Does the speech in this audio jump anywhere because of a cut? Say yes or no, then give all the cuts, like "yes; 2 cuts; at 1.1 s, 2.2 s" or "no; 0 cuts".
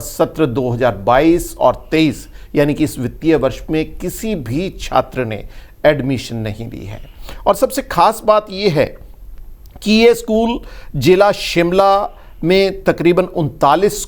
no; 0 cuts